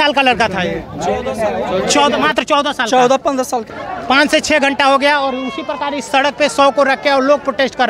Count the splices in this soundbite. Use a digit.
1